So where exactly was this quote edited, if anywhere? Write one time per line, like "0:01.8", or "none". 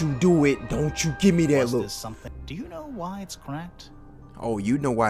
0:02.2